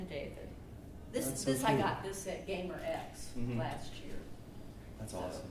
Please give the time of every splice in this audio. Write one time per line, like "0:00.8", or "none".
0:03.6